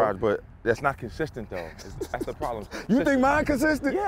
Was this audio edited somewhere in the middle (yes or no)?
no